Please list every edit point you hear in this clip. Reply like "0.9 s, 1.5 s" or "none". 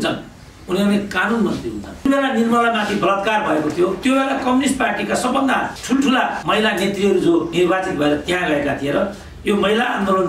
2.1 s, 4.0 s, 6.1 s, 7.5 s